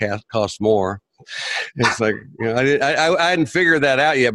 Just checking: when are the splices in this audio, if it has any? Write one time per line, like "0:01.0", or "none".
none